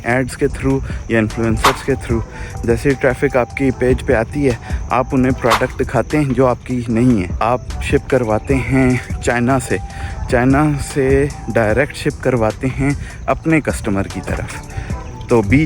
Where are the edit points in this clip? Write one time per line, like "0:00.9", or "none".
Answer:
0:07.3
0:09.1